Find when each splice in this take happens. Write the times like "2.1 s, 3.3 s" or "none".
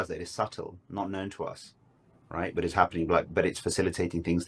3.2 s